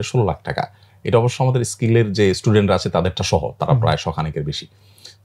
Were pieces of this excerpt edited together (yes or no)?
no